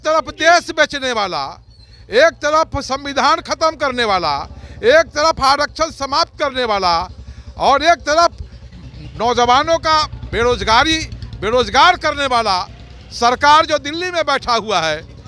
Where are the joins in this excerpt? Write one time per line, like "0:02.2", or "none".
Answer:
none

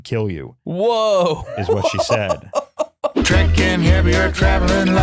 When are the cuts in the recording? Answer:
0:03.2

